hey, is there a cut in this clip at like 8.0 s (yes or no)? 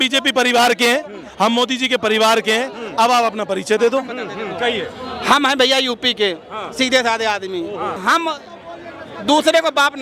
yes